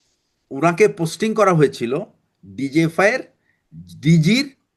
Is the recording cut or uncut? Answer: uncut